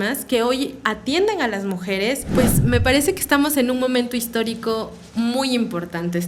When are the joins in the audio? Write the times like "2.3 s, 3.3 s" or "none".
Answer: 2.2 s